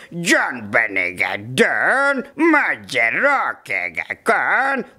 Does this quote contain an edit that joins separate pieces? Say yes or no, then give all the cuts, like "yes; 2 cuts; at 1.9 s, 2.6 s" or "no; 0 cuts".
yes; 1 cut; at 2.3 s